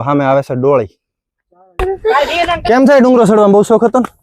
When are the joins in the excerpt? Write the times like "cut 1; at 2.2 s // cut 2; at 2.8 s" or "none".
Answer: cut 1; at 1.8 s